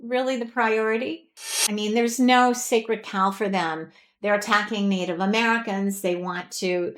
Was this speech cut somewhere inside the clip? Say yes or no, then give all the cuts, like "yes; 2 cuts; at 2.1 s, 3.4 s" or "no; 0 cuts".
yes; 1 cut; at 1.6 s